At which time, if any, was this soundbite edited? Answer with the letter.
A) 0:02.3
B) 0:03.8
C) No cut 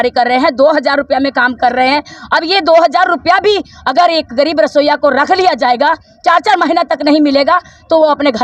C